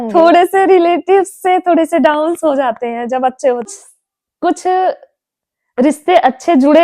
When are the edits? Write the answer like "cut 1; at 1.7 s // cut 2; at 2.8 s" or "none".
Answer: cut 1; at 3.9 s